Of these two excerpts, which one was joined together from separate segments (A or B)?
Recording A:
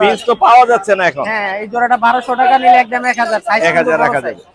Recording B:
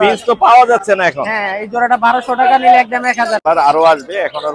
B